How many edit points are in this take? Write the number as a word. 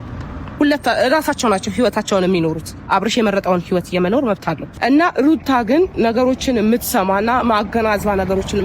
one